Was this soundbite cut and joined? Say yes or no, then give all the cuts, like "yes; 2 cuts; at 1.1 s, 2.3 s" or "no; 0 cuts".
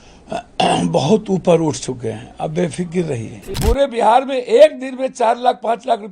yes; 1 cut; at 3.4 s